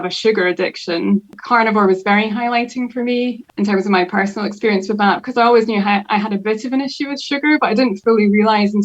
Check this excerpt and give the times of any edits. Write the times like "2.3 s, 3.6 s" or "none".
1.3 s, 3.4 s